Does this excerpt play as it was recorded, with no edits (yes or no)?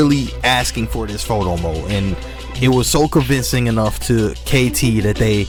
yes